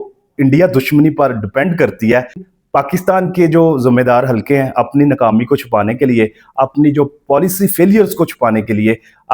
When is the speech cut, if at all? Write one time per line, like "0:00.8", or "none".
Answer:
0:02.4